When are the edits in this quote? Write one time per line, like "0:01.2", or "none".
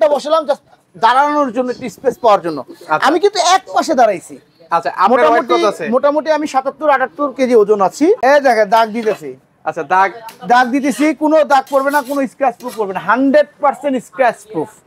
0:08.2